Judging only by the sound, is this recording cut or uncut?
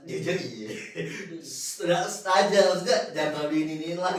uncut